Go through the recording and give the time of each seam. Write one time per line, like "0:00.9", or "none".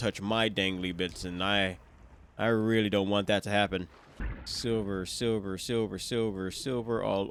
none